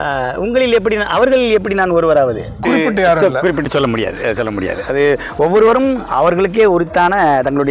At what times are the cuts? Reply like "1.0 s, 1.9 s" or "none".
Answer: 2.6 s